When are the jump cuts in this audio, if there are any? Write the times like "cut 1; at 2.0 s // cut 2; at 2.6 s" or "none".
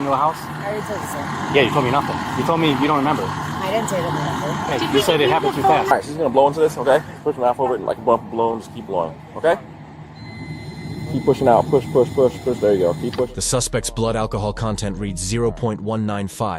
cut 1; at 5.9 s